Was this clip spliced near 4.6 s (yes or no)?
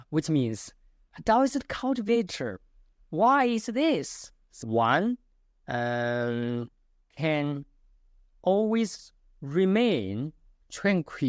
yes